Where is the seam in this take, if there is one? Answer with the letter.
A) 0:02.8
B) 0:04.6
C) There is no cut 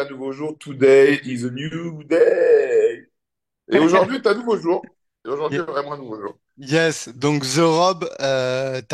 C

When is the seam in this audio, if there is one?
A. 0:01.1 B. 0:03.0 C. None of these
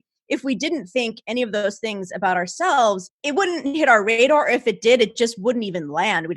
B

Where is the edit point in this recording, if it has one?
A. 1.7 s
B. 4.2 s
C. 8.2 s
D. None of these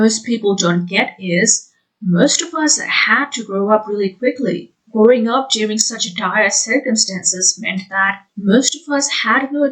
D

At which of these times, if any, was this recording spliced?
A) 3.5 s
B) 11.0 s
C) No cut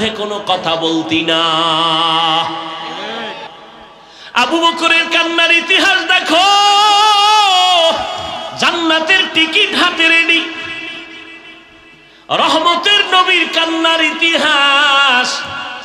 A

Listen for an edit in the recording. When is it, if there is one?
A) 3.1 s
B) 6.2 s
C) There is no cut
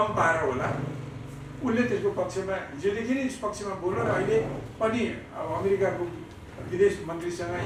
C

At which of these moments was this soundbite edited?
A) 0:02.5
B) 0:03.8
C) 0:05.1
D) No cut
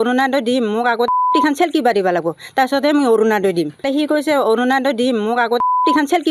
B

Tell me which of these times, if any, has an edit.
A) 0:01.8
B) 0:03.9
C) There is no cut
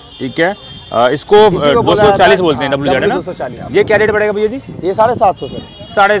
C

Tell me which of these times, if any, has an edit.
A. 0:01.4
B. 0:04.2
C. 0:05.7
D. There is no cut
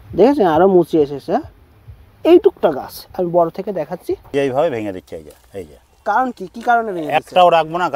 B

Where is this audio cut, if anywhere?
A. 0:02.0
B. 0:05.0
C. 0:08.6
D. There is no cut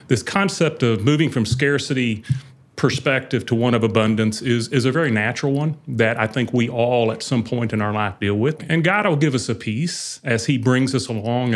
C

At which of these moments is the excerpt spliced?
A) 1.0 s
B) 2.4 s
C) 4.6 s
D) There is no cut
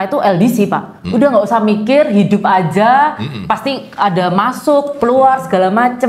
D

